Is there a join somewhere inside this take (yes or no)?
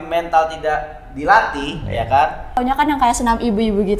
yes